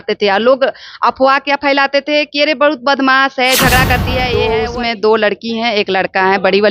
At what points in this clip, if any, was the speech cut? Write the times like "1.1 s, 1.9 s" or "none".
4.3 s